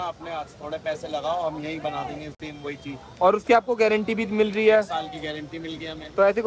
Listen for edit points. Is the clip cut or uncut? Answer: uncut